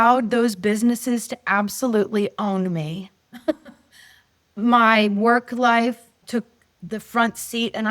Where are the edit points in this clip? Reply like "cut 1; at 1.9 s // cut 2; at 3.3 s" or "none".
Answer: cut 1; at 6.1 s